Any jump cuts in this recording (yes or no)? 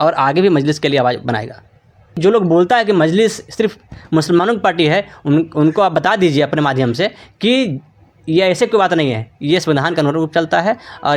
yes